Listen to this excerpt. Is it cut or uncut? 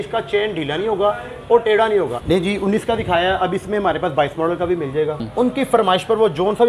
cut